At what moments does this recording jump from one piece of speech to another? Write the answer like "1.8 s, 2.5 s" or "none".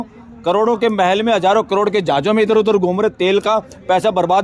none